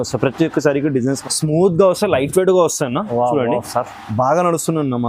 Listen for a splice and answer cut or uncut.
cut